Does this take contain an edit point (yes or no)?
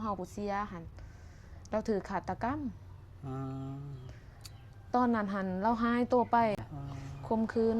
yes